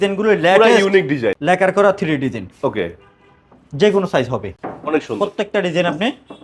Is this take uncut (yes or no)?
no